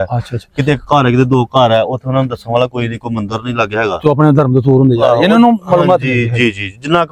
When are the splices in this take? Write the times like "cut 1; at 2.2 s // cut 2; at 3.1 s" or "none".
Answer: none